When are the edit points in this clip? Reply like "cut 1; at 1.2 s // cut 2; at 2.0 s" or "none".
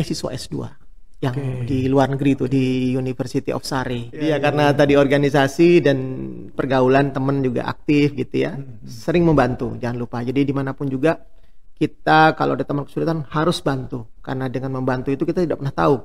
cut 1; at 4.2 s